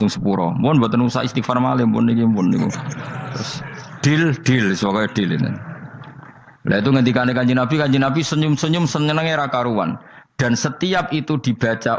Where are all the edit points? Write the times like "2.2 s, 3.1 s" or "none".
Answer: none

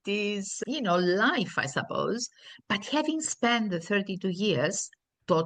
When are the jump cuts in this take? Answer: none

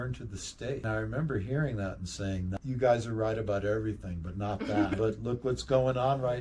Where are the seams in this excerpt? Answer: 0.8 s, 2.5 s, 4.9 s

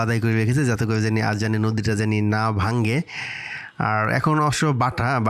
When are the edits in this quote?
none

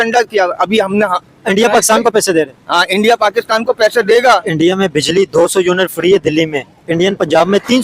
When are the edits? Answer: 4.5 s

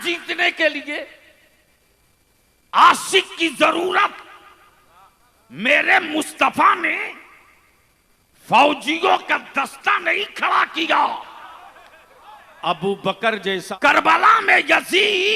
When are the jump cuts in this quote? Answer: 13.7 s

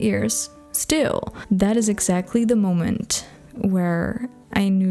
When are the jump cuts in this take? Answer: 1.3 s

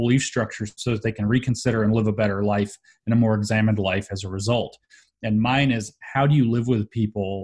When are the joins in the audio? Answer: none

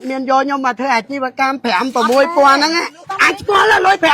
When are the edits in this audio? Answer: 3.0 s

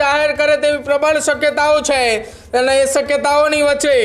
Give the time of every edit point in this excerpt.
none

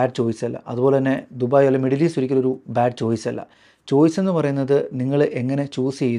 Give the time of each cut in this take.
none

